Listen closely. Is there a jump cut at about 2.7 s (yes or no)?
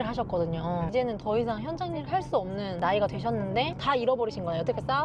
yes